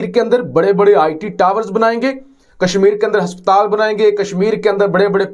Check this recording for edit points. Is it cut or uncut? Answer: uncut